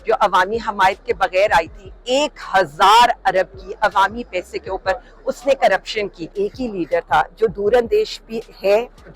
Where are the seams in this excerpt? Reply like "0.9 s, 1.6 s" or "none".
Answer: 6.3 s